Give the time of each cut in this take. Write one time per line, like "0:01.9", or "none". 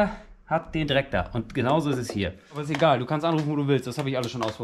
0:02.7